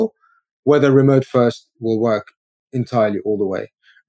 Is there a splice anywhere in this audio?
no; 0 cuts

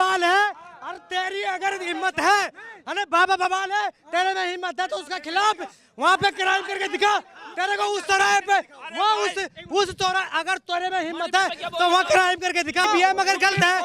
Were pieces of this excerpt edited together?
yes; 1 cut; at 12.8 s

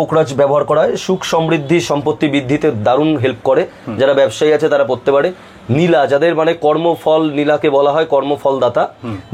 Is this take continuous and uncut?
yes; 0 cuts

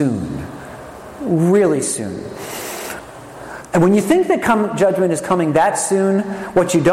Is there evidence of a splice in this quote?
yes; 1 cut; at 3.0 s

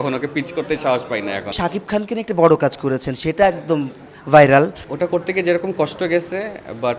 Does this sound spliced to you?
yes; 2 cuts; at 1.6 s, 4.8 s

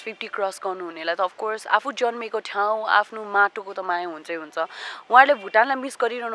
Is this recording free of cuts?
yes; 0 cuts

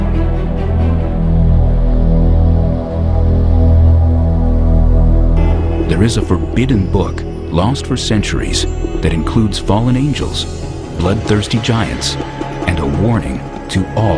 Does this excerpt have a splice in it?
no; 0 cuts

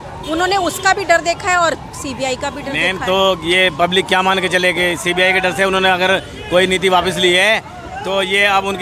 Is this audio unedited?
yes; 0 cuts

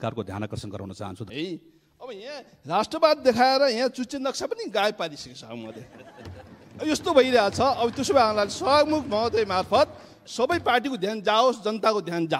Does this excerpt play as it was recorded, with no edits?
no; 1 cut; at 1.2 s

